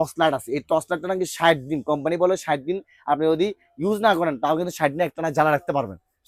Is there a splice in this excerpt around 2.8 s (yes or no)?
no